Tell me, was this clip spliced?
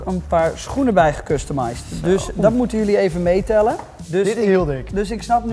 no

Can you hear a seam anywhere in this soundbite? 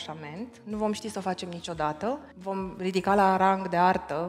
yes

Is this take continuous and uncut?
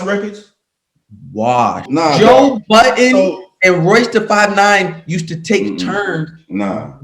no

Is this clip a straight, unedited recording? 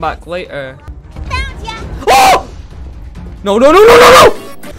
yes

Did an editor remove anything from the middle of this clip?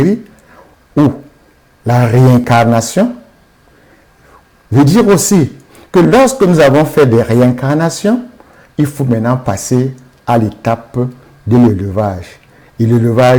no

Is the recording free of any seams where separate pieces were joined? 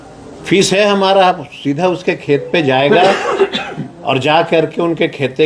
yes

